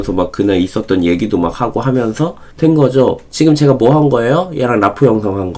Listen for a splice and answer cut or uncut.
uncut